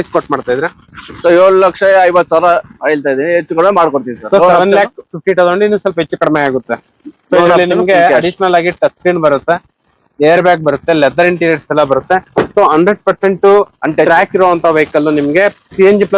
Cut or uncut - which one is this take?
uncut